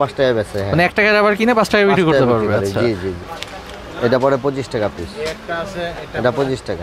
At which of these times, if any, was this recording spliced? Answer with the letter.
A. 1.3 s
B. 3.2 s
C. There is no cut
B